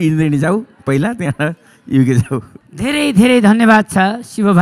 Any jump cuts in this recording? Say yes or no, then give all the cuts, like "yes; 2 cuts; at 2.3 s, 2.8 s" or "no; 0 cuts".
no; 0 cuts